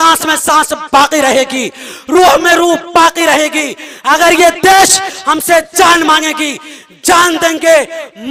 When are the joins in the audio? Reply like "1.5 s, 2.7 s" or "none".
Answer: none